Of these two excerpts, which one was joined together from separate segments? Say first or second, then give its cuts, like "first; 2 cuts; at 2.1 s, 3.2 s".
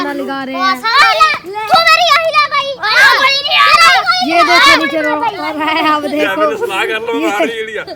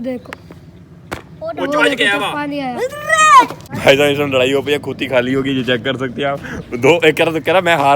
second; 1 cut; at 3.8 s